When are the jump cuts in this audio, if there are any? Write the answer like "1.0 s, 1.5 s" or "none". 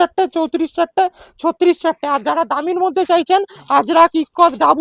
none